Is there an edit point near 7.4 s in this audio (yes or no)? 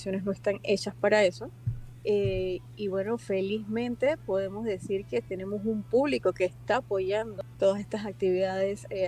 yes